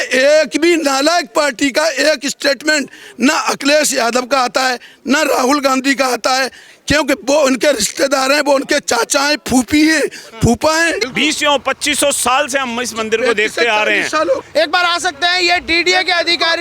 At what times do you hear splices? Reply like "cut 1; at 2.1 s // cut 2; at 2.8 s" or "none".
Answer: cut 1; at 11.0 s // cut 2; at 14.4 s